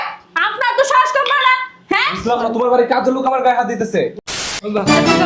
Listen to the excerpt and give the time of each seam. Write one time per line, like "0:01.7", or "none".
0:04.3